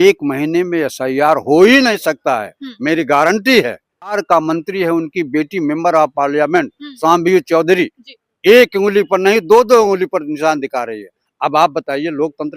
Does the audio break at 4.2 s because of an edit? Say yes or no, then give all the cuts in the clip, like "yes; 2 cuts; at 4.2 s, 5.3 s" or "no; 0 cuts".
yes; 1 cut; at 4.2 s